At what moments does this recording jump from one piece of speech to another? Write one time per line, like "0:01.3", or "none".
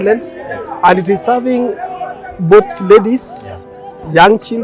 none